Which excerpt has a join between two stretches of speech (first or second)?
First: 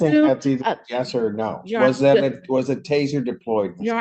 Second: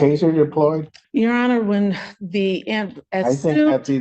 second